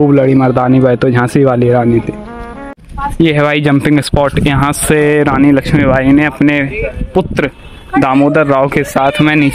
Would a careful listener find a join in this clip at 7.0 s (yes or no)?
no